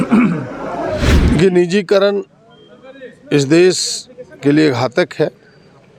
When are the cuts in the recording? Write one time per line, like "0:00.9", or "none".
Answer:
0:01.1

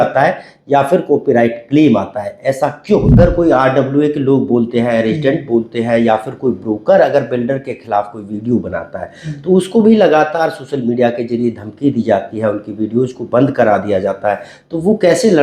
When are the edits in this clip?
0:03.1

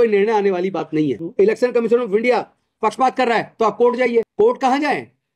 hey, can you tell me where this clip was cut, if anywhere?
0:01.2
0:04.3

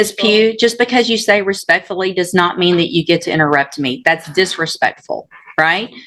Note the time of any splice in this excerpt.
none

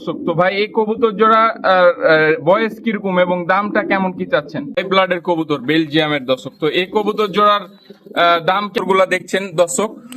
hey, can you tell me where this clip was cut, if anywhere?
0:04.8
0:08.8

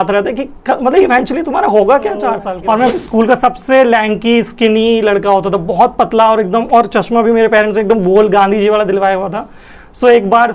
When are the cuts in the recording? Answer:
0:02.5

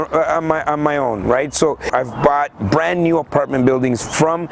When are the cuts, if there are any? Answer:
0:01.9

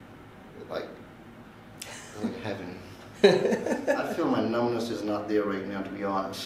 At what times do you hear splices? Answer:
0:04.1

